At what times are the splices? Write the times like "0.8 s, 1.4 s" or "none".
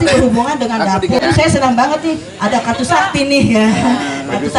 1.2 s